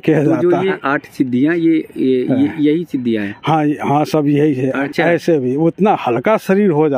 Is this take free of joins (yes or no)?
no